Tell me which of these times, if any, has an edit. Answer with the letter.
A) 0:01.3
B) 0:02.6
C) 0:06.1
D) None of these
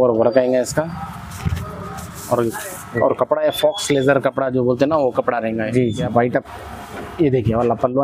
C